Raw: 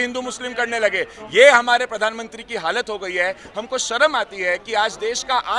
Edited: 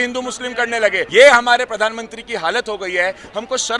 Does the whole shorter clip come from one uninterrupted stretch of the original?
no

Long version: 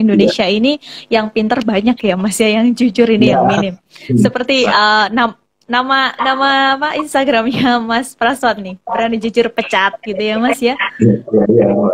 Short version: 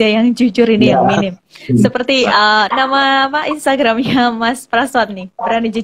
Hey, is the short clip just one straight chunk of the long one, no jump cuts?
no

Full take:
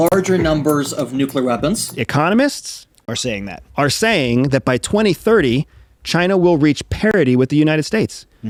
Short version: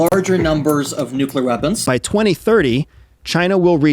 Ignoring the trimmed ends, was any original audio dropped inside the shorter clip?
yes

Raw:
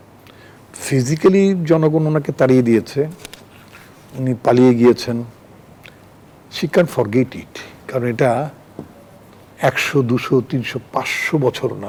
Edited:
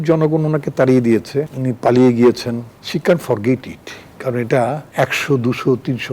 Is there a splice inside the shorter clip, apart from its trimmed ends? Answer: yes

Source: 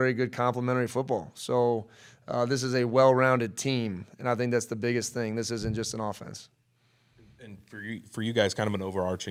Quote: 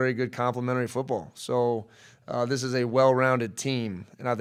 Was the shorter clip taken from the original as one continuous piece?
yes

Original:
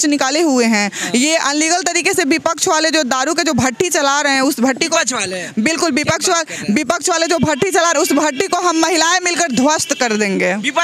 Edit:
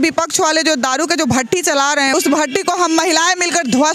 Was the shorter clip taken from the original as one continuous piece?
no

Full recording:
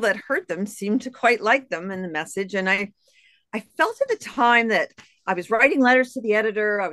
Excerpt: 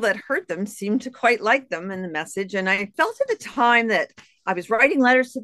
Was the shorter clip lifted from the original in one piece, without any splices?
no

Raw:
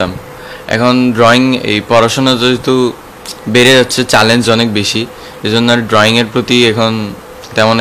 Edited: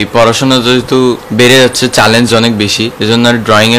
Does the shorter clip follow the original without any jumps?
no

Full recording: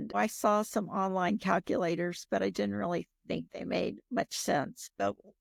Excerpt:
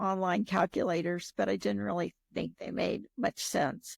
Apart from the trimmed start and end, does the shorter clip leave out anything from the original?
no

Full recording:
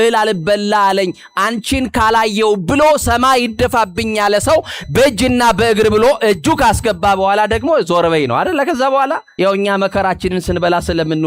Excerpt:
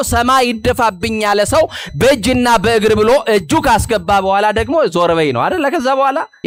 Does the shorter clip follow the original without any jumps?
yes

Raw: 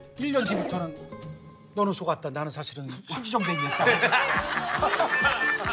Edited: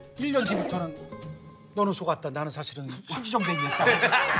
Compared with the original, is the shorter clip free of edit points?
yes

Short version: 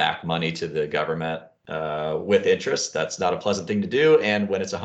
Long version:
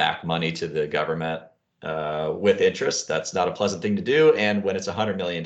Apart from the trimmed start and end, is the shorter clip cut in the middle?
yes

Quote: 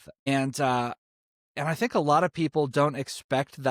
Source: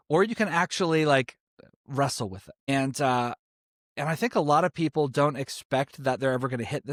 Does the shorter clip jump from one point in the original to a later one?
no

